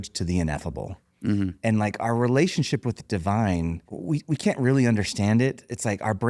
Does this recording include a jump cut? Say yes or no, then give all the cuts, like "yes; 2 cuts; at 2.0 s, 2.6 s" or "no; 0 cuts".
yes; 1 cut; at 3.9 s